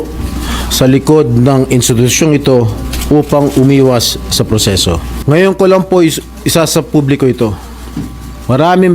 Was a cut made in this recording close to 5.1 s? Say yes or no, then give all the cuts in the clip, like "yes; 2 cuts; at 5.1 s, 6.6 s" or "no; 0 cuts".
yes; 1 cut; at 5.1 s